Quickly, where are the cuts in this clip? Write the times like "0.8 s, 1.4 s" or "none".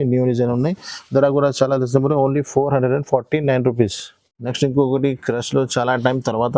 none